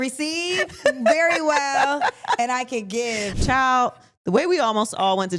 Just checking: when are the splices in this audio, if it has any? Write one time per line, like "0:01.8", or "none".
0:03.3